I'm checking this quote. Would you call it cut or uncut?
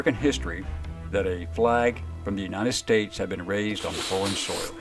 uncut